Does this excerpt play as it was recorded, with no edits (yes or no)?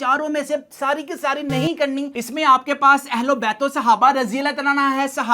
no